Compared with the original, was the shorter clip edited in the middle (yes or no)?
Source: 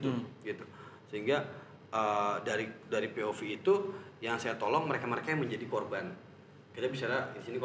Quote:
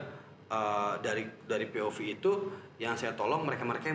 no